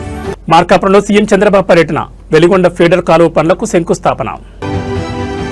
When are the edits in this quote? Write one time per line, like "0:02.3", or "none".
none